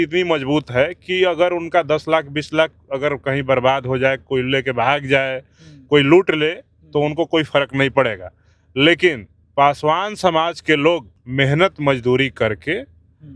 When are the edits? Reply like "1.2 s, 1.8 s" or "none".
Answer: 11.2 s